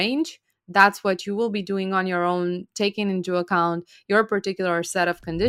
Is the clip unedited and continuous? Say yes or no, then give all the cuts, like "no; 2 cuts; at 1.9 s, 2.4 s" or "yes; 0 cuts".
yes; 0 cuts